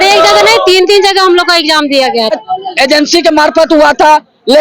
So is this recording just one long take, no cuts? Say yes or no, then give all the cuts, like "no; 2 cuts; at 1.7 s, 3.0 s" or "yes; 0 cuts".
no; 1 cut; at 2.4 s